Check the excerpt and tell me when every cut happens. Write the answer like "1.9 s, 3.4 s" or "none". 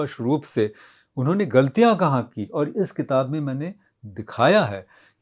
none